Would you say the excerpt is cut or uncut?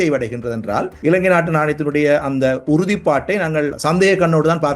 cut